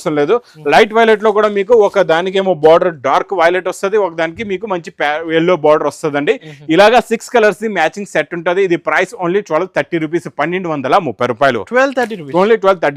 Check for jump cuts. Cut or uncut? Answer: uncut